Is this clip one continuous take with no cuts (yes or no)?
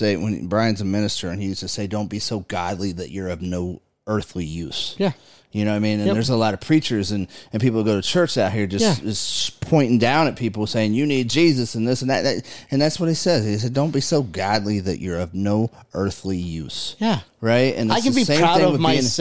yes